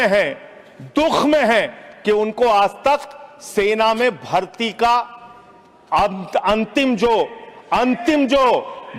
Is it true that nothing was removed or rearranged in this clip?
yes; 0 cuts

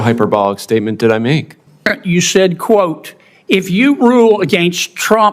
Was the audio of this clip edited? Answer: yes; 1 cut; at 1.9 s

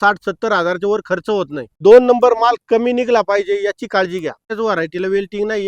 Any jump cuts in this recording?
yes; 2 cuts; at 1.7 s, 4.5 s

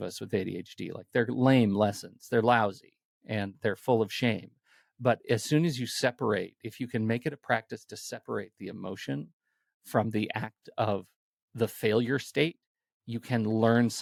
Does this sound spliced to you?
no; 0 cuts

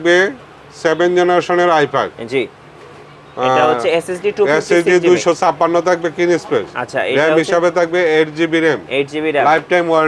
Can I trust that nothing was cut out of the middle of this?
yes; 0 cuts

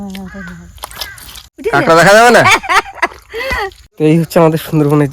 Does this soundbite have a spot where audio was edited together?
yes; 2 cuts; at 1.5 s, 3.8 s

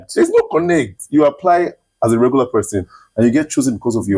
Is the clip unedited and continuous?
yes; 0 cuts

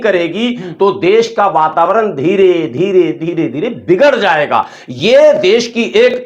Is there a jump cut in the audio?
no; 0 cuts

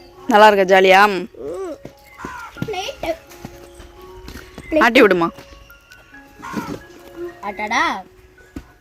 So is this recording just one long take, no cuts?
yes; 0 cuts

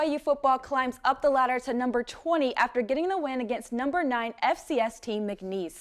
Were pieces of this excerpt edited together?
no; 0 cuts

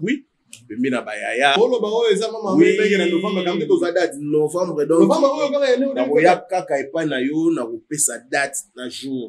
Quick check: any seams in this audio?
yes; 1 cut; at 1.6 s

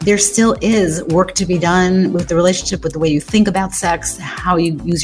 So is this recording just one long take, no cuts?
yes; 0 cuts

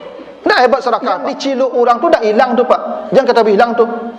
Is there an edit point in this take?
yes; 1 cut; at 1.3 s

